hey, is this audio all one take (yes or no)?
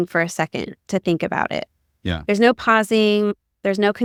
yes